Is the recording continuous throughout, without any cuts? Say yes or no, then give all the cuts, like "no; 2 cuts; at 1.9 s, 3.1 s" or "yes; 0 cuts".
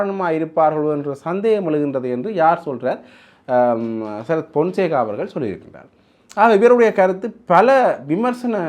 yes; 0 cuts